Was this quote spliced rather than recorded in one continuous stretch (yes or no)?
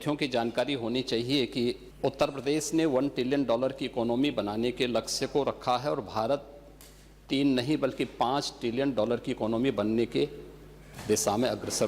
yes